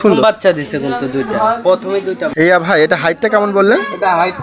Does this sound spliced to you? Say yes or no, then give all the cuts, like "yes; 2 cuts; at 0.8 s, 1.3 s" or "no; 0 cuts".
yes; 1 cut; at 2.2 s